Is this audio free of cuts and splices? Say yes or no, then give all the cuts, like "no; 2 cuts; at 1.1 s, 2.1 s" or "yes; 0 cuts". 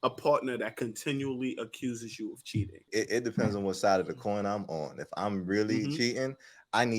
no; 1 cut; at 2.8 s